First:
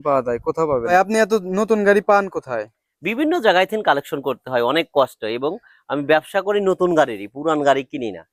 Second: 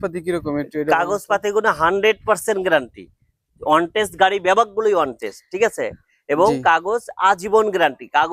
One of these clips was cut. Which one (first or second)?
first